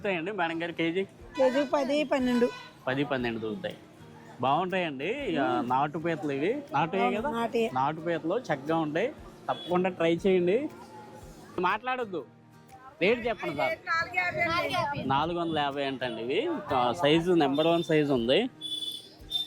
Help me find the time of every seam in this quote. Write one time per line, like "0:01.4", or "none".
0:11.6